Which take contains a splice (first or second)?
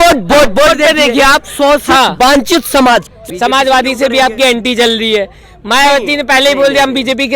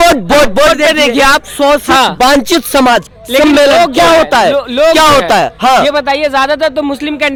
first